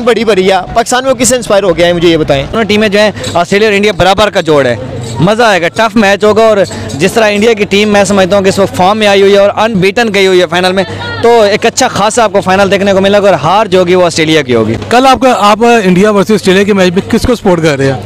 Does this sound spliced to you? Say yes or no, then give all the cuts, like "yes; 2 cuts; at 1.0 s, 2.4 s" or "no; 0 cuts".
no; 0 cuts